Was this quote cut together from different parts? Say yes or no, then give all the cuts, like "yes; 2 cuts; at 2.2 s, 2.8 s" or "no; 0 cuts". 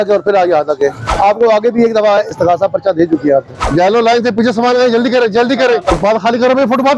yes; 1 cut; at 5.9 s